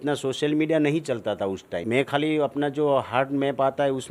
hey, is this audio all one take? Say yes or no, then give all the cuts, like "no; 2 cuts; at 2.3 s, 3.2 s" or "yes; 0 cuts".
no; 1 cut; at 1.7 s